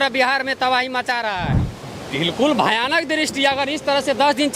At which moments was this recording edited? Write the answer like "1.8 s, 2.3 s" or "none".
1.6 s